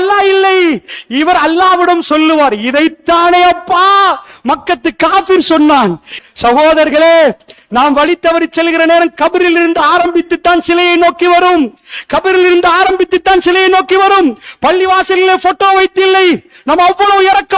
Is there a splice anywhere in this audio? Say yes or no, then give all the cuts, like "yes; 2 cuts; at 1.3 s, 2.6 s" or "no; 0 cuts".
yes; 2 cuts; at 6.1 s, 7.5 s